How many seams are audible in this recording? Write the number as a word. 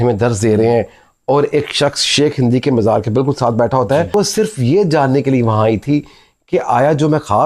one